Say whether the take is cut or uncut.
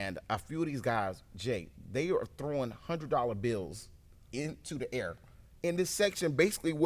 uncut